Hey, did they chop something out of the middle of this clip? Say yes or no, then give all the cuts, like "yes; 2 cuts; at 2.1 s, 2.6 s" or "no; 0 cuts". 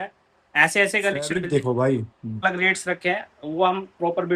yes; 1 cut; at 2.4 s